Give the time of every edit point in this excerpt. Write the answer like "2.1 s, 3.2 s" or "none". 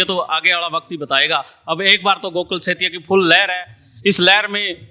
none